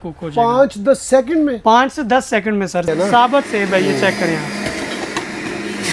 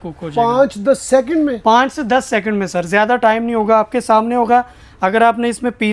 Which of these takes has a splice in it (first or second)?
first